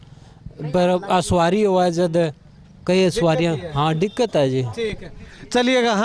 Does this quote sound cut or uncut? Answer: uncut